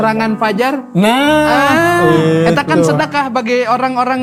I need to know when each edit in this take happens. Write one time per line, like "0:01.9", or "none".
none